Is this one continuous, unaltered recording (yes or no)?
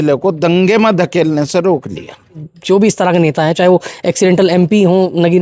no